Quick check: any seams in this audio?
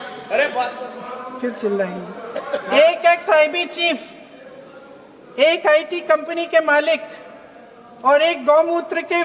no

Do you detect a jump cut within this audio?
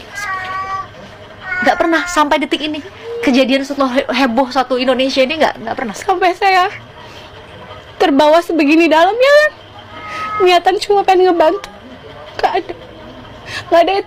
no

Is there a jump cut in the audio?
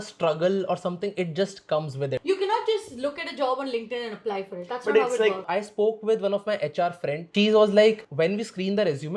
yes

